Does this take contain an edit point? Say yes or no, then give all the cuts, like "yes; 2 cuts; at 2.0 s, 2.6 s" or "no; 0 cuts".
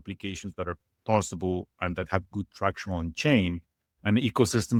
no; 0 cuts